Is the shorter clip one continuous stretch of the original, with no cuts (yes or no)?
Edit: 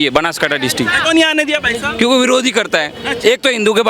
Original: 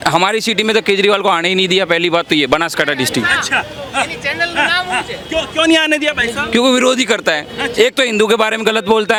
no